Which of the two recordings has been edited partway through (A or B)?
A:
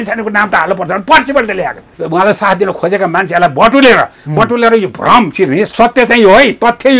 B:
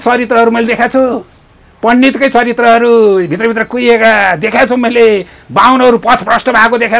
A